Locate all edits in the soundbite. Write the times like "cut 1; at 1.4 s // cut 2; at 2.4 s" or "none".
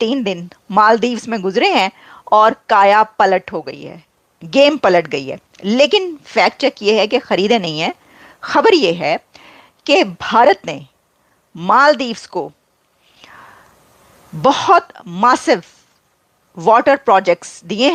none